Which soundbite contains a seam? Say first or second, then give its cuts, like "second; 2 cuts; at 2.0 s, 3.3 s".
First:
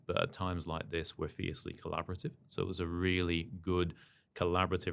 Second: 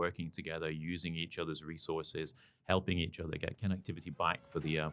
second; 1 cut; at 3.6 s